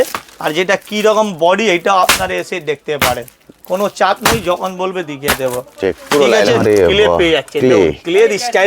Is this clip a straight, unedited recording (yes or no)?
no